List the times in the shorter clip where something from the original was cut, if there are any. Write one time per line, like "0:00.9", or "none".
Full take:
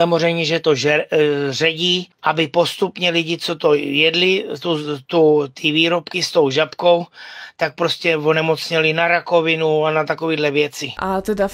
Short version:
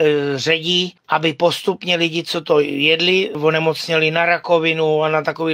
0:03.4